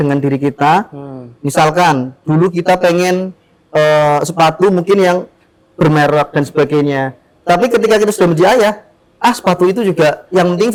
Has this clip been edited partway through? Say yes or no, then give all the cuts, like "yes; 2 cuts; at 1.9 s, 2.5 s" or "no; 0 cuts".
no; 0 cuts